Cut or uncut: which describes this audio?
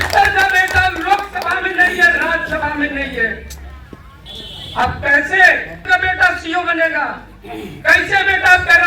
uncut